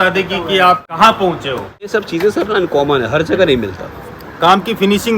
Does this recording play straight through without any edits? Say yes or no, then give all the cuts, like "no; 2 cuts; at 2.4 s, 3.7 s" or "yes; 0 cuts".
no; 2 cuts; at 0.9 s, 1.9 s